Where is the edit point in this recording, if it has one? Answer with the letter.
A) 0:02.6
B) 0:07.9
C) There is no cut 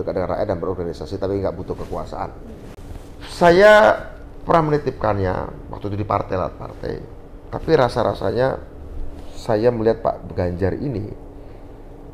A